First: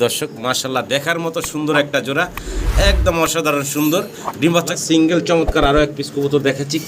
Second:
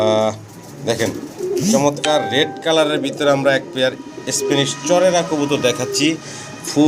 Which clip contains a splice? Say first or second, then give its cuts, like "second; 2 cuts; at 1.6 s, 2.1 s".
first; 1 cut; at 4.7 s